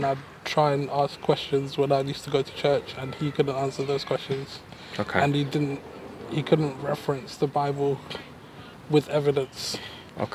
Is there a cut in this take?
no; 0 cuts

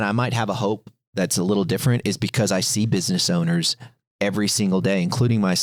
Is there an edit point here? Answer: no; 0 cuts

